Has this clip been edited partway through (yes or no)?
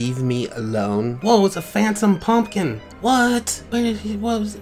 yes